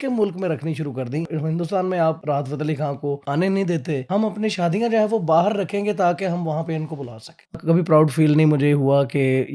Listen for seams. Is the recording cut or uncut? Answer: cut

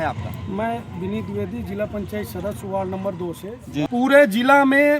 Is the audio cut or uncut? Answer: cut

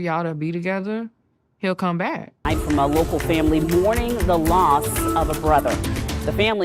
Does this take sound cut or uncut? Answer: cut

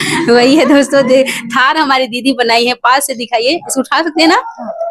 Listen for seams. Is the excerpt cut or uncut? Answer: uncut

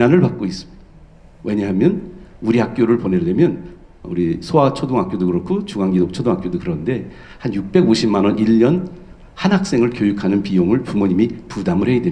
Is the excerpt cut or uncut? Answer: uncut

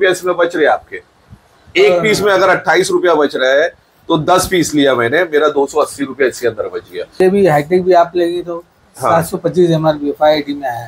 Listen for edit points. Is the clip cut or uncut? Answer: cut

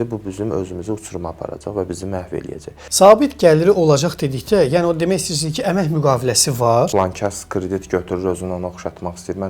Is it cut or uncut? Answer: cut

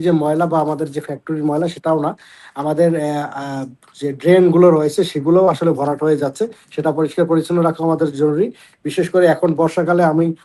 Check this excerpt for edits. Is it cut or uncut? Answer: uncut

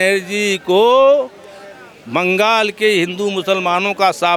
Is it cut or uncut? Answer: uncut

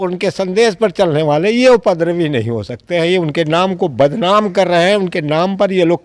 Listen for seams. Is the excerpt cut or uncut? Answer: uncut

